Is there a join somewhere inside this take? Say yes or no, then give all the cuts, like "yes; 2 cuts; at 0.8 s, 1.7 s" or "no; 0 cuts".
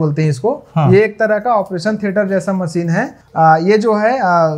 no; 0 cuts